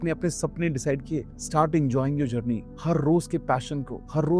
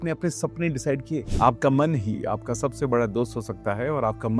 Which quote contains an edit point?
second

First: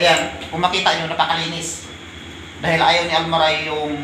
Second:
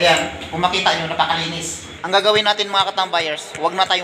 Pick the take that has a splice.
second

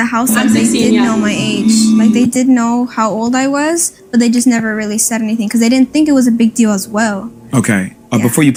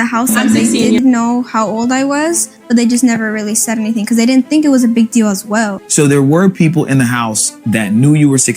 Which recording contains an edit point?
second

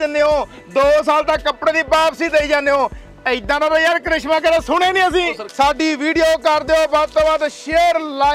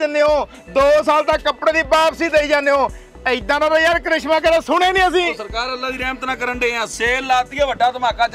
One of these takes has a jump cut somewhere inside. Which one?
first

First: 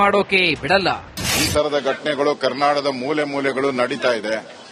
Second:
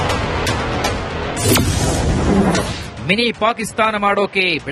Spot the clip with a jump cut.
second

